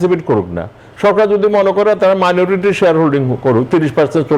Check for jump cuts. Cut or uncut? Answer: uncut